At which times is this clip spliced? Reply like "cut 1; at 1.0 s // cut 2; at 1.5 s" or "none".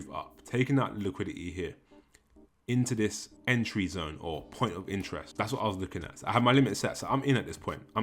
cut 1; at 3.3 s // cut 2; at 5.3 s